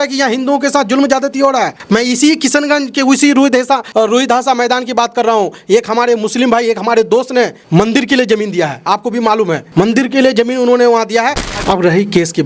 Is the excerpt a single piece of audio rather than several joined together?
no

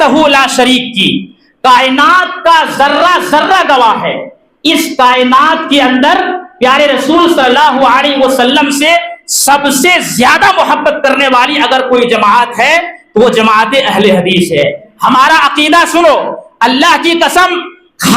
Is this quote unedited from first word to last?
no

